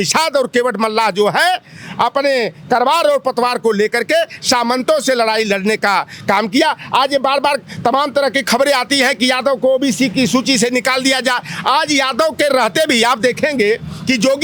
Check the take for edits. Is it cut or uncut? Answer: uncut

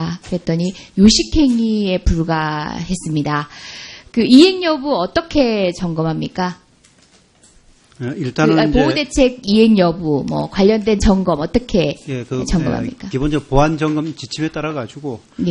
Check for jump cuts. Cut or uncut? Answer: cut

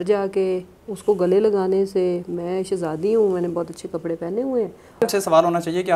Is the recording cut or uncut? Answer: cut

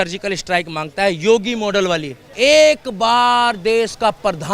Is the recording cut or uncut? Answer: cut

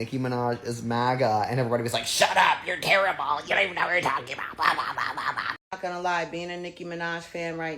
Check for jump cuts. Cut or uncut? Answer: cut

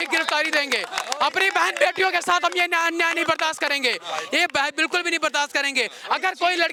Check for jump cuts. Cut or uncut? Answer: uncut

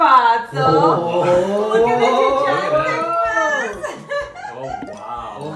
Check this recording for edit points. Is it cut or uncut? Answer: uncut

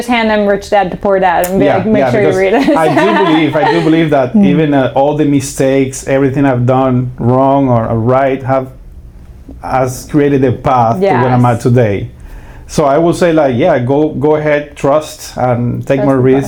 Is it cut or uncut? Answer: uncut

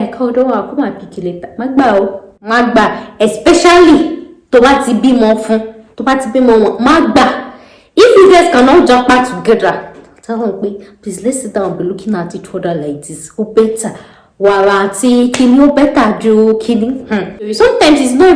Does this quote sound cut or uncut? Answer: cut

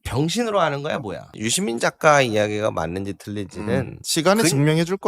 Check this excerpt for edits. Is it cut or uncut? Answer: cut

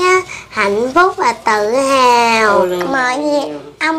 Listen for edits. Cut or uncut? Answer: cut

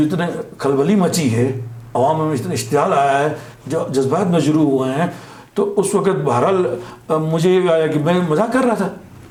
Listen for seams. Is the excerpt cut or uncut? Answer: uncut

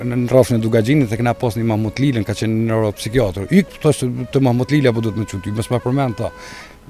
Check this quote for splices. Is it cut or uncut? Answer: uncut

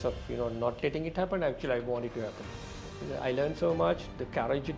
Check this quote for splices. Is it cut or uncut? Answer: uncut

